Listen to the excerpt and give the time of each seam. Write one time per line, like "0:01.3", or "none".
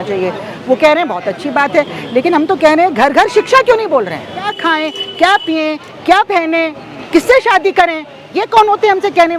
0:04.5